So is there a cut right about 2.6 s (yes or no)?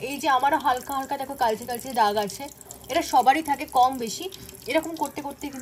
no